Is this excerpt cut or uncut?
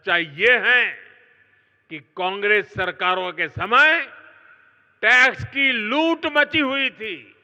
uncut